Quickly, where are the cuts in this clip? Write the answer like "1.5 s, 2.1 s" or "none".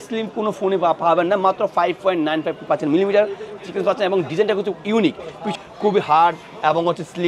5.5 s